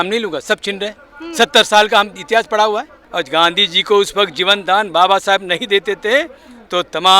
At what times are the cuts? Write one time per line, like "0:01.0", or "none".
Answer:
0:03.0